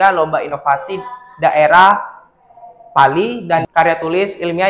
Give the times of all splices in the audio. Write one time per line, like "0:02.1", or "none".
0:03.6